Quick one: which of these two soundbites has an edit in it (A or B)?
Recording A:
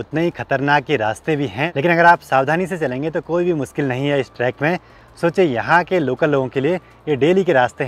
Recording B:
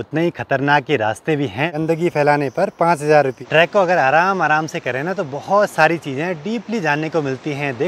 B